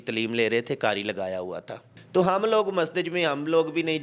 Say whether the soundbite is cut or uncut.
cut